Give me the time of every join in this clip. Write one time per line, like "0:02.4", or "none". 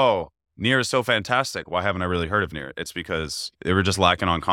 0:01.6
0:03.4